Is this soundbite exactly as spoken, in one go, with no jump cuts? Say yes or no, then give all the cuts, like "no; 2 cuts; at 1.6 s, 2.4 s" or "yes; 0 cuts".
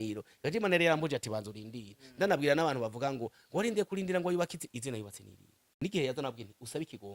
no; 1 cut; at 5.7 s